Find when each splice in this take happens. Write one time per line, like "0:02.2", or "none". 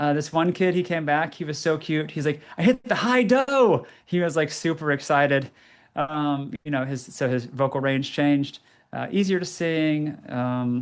none